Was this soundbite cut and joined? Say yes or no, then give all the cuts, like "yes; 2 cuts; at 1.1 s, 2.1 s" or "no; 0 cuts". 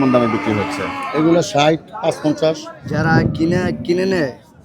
yes; 1 cut; at 2.7 s